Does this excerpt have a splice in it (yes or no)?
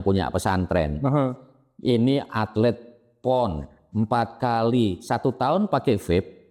no